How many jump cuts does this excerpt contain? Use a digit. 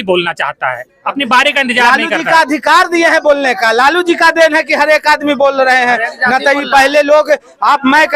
0